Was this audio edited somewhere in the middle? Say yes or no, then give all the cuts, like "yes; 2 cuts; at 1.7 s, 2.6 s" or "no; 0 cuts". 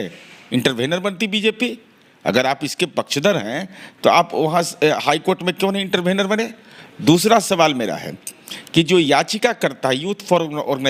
no; 0 cuts